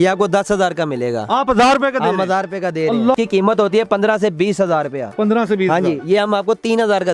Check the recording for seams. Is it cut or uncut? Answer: cut